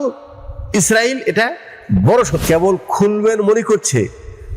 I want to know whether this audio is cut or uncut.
cut